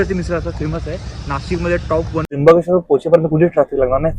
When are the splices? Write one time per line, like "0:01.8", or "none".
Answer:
0:02.2

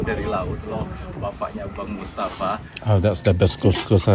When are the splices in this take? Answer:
0:02.7

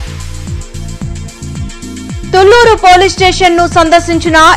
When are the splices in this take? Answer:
0:01.0

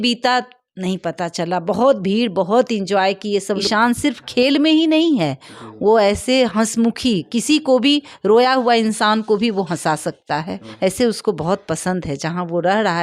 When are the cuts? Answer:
0:03.6
0:10.7

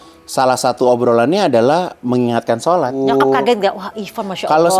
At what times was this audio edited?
0:03.0

